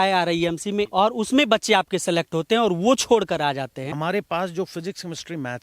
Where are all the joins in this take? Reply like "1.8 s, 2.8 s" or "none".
0.9 s, 3.8 s